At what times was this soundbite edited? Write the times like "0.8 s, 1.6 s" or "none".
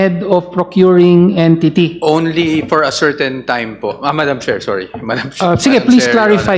none